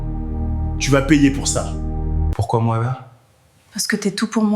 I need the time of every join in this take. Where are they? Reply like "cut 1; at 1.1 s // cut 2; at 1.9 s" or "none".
cut 1; at 2.2 s